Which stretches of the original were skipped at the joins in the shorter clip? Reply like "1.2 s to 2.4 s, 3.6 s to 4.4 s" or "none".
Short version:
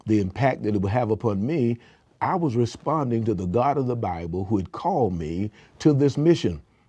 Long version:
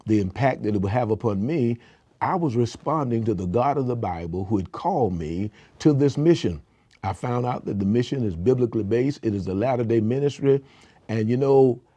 none